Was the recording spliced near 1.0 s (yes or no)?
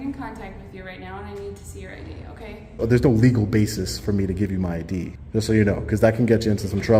no